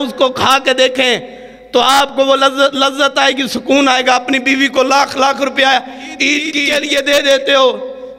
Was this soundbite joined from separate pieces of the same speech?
yes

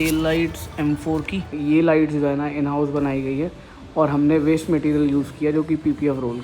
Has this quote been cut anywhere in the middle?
yes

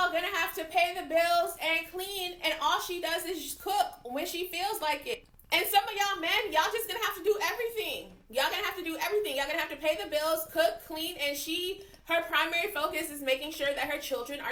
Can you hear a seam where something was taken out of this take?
no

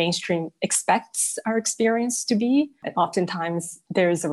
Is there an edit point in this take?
no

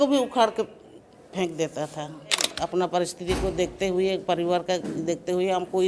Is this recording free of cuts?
no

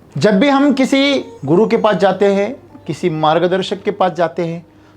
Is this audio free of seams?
no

